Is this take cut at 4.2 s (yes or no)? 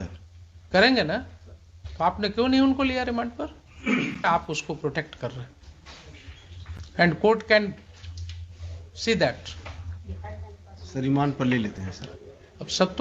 yes